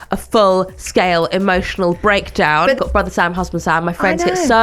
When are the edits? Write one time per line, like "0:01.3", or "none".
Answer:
0:02.8